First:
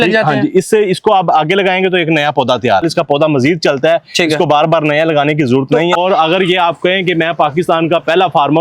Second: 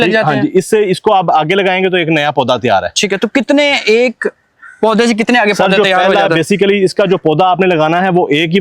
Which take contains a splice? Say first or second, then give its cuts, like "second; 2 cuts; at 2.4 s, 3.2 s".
first; 2 cuts; at 2.8 s, 5.9 s